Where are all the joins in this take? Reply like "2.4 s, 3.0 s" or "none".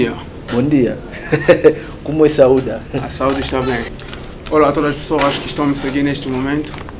3.9 s